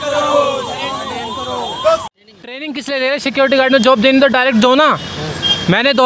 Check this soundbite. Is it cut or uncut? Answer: cut